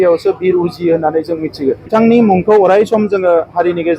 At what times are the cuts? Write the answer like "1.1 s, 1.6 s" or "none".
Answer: 1.8 s